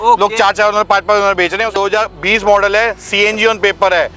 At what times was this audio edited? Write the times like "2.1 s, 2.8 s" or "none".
1.7 s